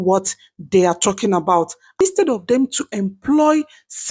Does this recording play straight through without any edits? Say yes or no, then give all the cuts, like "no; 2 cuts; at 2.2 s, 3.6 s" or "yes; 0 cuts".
no; 1 cut; at 2.0 s